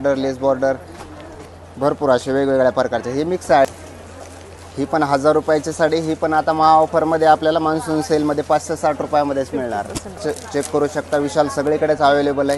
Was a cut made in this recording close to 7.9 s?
no; 2 cuts; at 3.7 s, 10.2 s

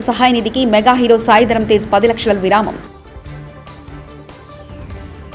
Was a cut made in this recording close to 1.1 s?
no; 0 cuts

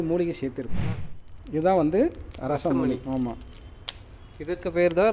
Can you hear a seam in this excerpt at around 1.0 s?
yes; 1 cut; at 1.0 s

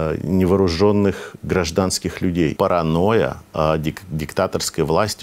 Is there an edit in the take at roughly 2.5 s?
yes; 1 cut; at 2.5 s

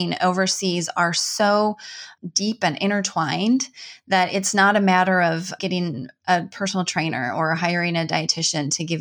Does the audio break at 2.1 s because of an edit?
yes; 2 cuts; at 2.1 s, 5.6 s

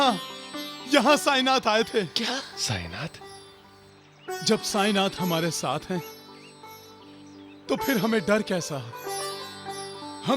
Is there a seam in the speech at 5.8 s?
no; 1 cut; at 9.0 s

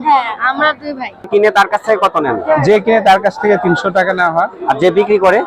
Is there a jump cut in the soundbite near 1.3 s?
yes; 1 cut; at 1.3 s

